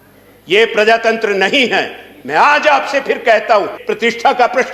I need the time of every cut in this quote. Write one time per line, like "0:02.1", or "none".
0:03.8